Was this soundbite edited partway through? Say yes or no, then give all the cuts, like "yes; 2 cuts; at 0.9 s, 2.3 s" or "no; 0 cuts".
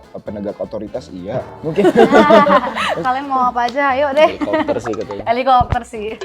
yes; 2 cuts; at 1.5 s, 3.0 s